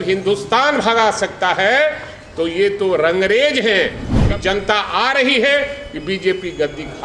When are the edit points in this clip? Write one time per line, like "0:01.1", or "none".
0:04.1